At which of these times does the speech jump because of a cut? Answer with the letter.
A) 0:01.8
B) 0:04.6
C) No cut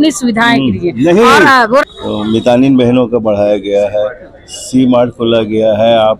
A